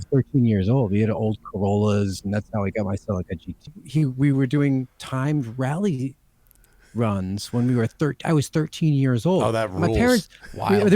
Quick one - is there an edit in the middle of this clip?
yes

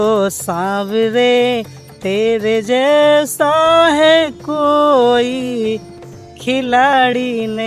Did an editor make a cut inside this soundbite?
no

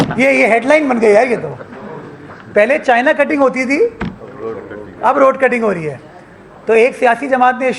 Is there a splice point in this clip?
no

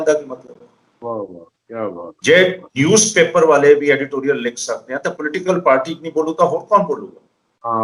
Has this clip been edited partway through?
no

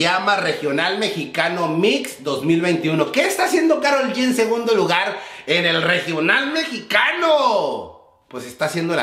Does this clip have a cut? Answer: no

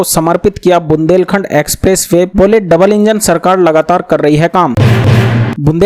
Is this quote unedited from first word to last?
no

